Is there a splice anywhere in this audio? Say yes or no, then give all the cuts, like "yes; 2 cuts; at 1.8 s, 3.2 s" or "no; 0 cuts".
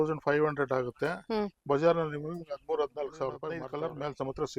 yes; 1 cut; at 3.6 s